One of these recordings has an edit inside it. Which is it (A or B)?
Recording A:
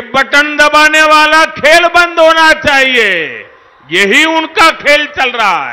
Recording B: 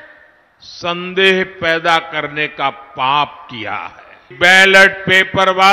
B